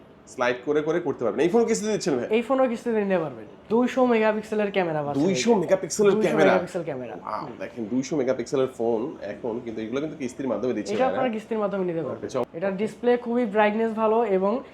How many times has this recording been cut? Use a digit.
2